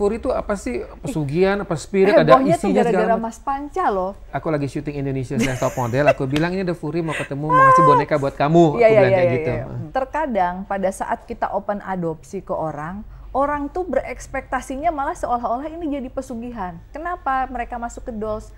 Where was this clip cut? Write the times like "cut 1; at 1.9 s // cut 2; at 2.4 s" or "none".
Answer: cut 1; at 4.3 s // cut 2; at 9.7 s // cut 3; at 16.8 s